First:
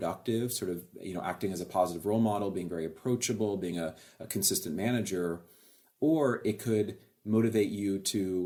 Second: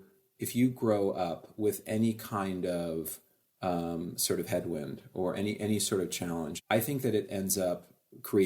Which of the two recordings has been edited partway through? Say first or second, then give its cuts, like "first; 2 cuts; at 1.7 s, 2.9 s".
second; 1 cut; at 6.6 s